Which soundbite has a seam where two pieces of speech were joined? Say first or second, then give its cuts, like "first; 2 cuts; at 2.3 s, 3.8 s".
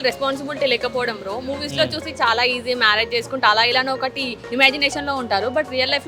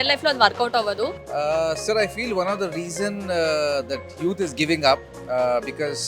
second; 1 cut; at 1.2 s